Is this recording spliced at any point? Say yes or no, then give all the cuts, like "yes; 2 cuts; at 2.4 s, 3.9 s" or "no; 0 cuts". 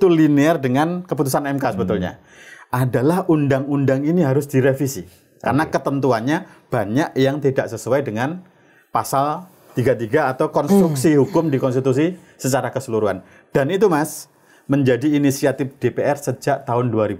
no; 0 cuts